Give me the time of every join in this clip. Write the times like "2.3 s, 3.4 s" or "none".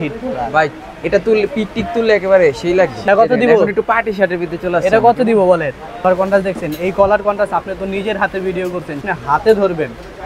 3.1 s, 6.0 s, 9.0 s